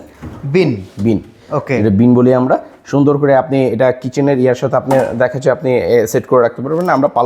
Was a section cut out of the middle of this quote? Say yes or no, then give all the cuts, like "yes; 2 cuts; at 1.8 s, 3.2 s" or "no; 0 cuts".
no; 0 cuts